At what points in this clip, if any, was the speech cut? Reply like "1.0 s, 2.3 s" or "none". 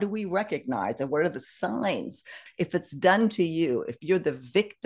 2.4 s

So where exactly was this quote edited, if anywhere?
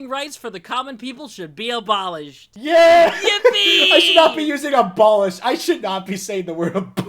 2.4 s

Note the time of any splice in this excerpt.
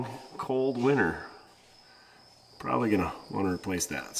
none

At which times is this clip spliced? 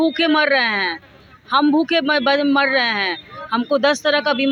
none

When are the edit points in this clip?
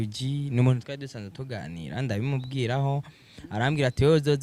none

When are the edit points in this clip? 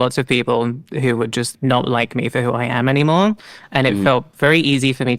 1.5 s

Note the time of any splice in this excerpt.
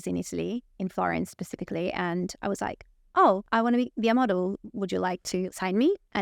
3.4 s, 5.5 s

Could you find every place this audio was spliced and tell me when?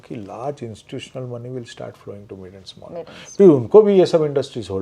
none

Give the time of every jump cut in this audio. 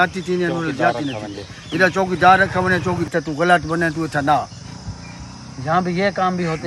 3.1 s

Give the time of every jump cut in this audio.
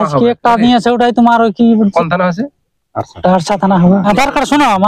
1.9 s, 4.0 s

